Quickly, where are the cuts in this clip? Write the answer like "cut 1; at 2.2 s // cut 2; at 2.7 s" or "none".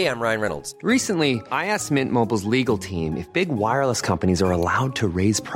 none